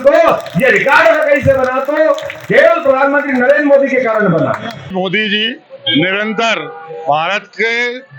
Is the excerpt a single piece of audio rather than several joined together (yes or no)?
no